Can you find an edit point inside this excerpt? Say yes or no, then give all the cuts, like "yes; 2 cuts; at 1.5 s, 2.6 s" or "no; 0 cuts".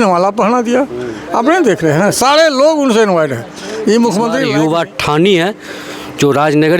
yes; 1 cut; at 4.4 s